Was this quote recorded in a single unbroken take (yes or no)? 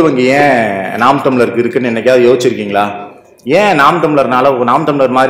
yes